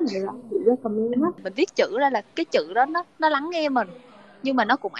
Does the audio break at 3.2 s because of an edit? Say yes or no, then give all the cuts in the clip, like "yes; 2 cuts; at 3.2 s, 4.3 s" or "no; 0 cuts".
no; 1 cut; at 1.5 s